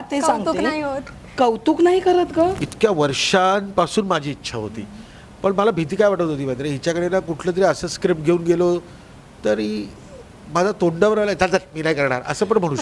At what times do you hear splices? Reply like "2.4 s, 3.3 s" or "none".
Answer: 2.7 s